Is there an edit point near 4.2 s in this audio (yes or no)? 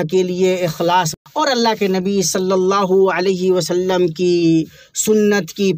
no